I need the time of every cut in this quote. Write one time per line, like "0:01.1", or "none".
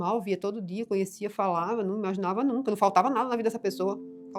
none